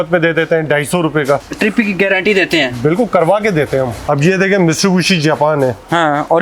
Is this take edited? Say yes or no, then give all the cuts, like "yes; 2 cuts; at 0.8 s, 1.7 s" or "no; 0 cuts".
yes; 2 cuts; at 1.4 s, 4.0 s